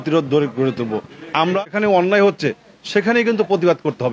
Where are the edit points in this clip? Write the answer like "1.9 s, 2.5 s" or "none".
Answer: 1.6 s